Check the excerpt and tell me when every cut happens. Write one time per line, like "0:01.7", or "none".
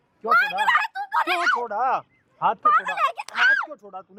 none